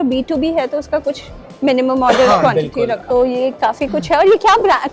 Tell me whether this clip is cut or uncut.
cut